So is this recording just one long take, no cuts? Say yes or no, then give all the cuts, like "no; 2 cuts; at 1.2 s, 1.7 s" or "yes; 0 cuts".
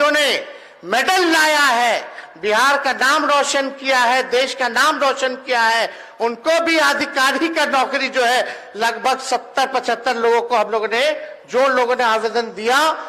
yes; 0 cuts